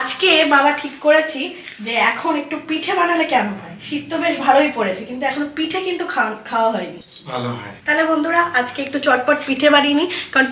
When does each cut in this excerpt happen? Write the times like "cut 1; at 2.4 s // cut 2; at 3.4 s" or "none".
none